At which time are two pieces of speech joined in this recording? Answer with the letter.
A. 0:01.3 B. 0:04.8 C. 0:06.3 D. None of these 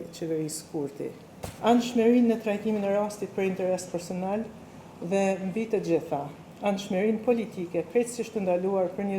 A